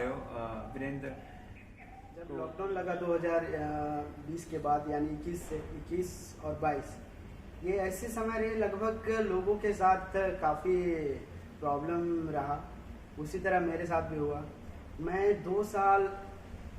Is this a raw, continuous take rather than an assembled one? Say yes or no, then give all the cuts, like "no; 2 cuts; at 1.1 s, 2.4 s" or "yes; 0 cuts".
no; 1 cut; at 2.2 s